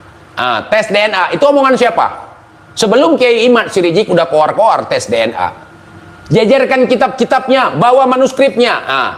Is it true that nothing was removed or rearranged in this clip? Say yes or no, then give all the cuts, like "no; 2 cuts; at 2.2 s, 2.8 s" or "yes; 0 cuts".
yes; 0 cuts